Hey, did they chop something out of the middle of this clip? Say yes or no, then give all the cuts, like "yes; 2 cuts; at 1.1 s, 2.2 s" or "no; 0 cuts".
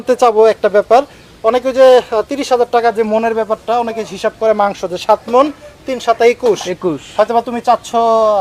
no; 0 cuts